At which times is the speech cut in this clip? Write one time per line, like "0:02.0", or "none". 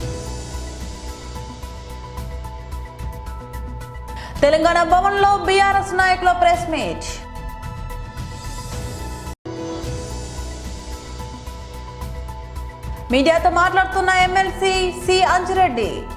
0:09.4
0:11.8
0:13.1